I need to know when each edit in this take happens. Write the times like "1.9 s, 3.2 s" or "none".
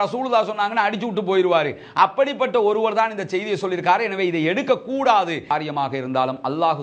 5.5 s

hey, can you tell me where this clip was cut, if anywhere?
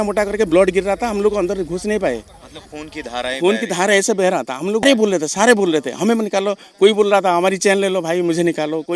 4.8 s

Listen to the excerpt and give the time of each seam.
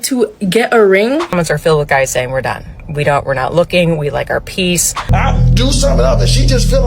1.4 s, 5.0 s

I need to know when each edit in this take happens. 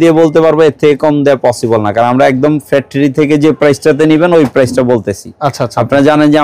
none

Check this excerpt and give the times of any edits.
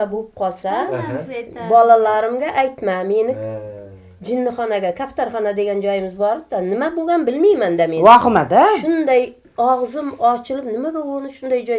none

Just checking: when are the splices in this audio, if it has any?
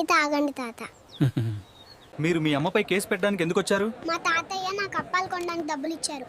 2.0 s

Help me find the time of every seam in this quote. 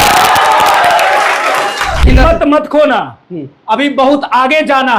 2.0 s

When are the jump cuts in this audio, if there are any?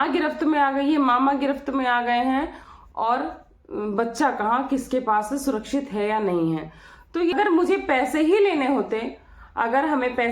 7.3 s

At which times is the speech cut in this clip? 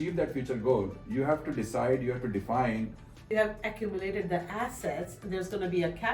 3.2 s

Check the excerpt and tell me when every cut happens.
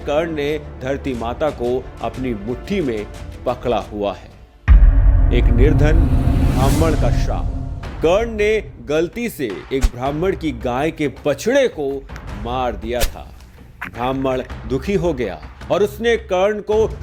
none

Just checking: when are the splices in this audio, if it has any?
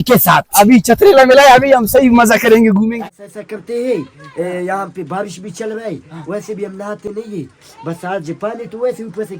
2.9 s

